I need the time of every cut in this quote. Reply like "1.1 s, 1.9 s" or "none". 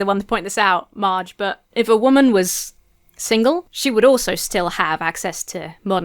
1.6 s, 3.7 s